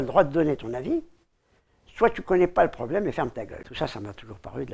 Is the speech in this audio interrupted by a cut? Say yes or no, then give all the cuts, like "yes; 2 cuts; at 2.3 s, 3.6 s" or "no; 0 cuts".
yes; 1 cut; at 3.6 s